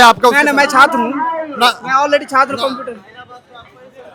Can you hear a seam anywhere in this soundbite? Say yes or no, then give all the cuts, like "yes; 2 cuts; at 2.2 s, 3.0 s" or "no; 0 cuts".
no; 0 cuts